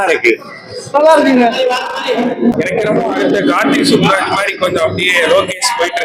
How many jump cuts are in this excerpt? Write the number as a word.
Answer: one